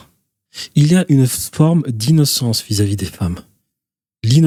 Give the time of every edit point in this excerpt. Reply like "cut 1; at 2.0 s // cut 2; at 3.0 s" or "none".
none

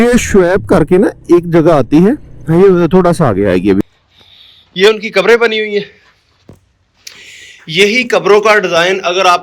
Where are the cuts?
cut 1; at 3.8 s

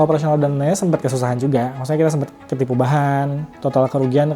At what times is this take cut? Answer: cut 1; at 3.4 s

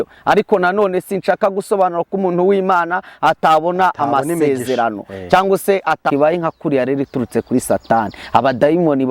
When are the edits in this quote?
cut 1; at 6.0 s

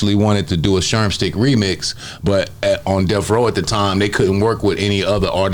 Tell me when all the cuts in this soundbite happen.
none

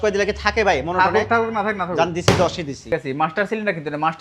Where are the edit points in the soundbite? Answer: cut 1; at 2.9 s

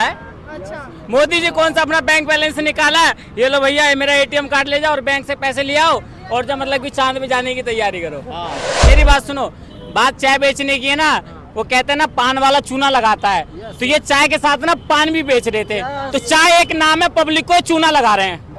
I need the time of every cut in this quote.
cut 1; at 8.7 s

